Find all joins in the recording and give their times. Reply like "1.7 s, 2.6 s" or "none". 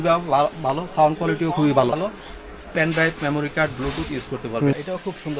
1.9 s, 4.7 s